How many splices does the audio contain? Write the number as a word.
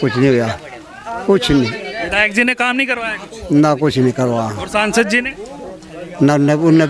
zero